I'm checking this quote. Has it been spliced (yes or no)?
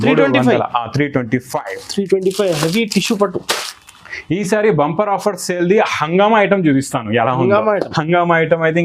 no